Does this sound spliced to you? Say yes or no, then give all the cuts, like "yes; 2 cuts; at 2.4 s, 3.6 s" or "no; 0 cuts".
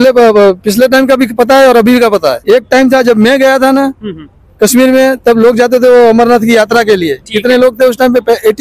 yes; 1 cut; at 2.4 s